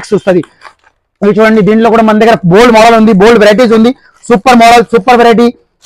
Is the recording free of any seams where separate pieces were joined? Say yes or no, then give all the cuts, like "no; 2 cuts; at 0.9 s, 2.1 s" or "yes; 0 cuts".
yes; 0 cuts